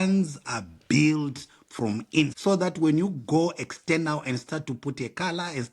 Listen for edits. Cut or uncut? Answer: cut